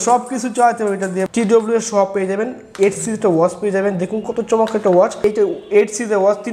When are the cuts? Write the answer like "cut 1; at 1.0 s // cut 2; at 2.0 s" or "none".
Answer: cut 1; at 1.2 s // cut 2; at 5.2 s